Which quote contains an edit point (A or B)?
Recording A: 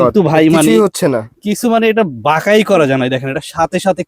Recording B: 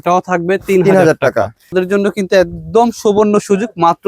B